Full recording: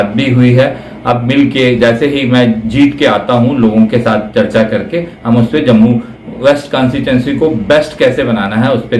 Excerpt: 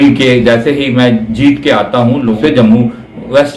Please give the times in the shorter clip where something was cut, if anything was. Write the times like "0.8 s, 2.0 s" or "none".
2.4 s